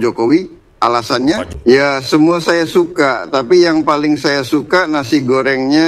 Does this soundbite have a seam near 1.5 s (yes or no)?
yes